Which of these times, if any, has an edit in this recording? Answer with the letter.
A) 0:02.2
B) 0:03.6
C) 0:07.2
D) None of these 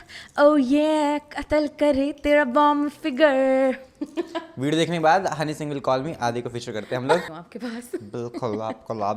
C